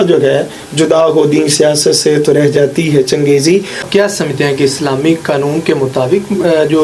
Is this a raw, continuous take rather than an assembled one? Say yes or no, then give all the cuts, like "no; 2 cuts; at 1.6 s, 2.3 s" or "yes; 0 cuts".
no; 1 cut; at 3.8 s